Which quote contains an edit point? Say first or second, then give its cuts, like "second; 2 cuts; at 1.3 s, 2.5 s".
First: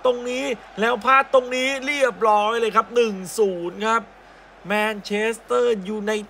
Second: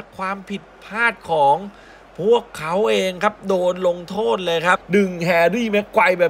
second; 1 cut; at 4.8 s